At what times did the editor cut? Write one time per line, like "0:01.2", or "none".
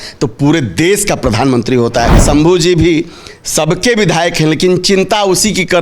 0:02.2